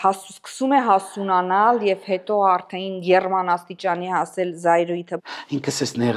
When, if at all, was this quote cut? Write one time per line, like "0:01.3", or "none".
0:05.1